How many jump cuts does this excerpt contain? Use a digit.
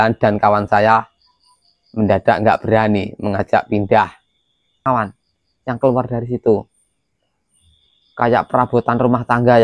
1